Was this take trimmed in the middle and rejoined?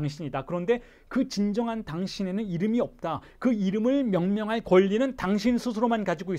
no; 0 cuts

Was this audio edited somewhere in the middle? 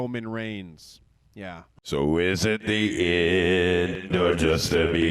yes; 1 cut; at 1.6 s

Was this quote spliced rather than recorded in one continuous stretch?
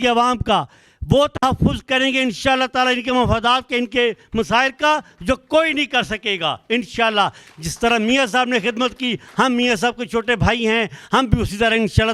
no; 0 cuts

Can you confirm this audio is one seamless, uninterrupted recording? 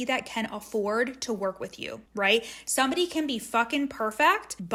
yes; 0 cuts

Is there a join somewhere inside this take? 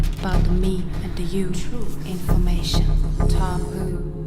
yes; 1 cut; at 3.0 s

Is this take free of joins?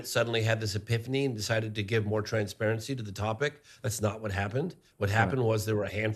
yes; 0 cuts

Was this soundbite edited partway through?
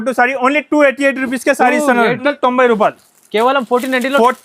yes; 1 cut; at 2.3 s

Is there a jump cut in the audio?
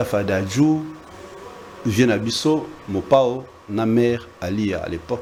no; 0 cuts

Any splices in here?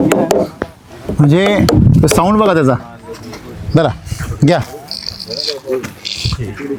no; 0 cuts

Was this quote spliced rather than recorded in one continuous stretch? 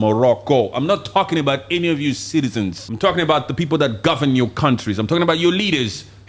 yes; 1 cut; at 2.8 s

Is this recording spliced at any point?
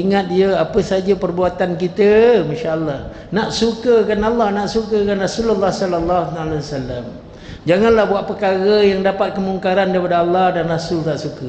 no; 0 cuts

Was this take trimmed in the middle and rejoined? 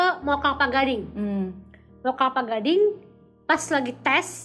no; 0 cuts

